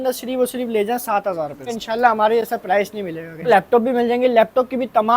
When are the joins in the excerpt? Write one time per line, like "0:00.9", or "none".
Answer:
0:01.7
0:03.5